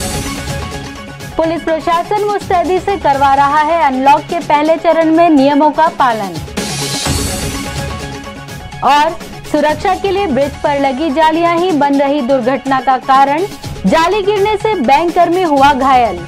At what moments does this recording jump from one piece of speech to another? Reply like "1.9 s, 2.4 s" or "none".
1.2 s